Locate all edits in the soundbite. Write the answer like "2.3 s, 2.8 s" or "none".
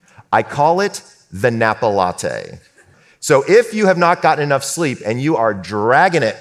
2.9 s